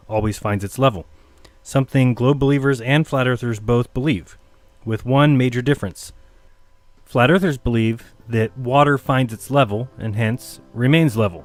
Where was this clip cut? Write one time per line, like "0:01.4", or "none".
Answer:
none